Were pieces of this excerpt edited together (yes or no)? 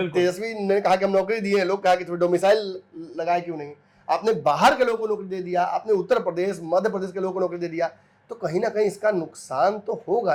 no